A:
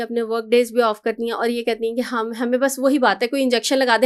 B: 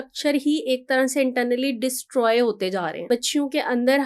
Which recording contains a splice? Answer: B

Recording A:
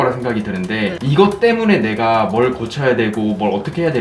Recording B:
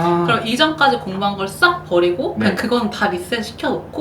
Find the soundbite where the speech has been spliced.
A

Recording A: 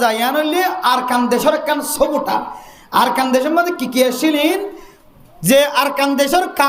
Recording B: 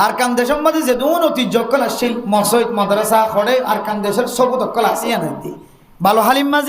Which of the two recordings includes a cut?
B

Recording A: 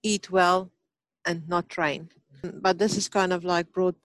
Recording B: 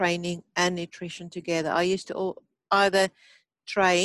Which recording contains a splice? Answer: A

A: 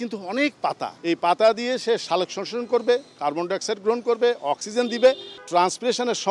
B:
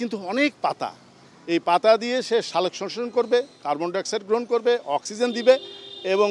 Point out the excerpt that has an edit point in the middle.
A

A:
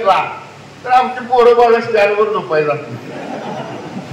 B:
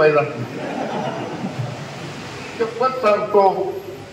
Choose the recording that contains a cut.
B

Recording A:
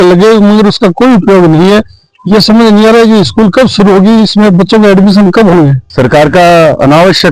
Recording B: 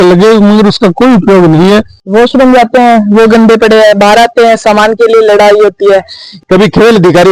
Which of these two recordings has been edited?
B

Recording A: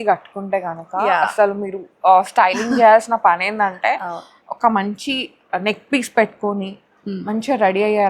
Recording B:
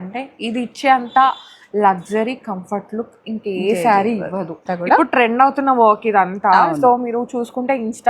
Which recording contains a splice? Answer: B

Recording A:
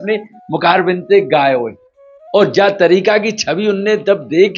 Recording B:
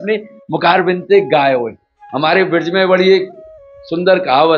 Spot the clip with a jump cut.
B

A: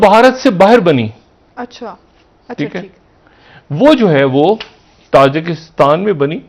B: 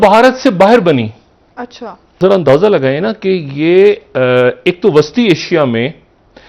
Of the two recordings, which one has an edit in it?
B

